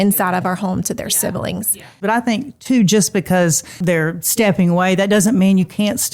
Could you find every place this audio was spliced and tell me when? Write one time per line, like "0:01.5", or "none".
0:02.0
0:03.7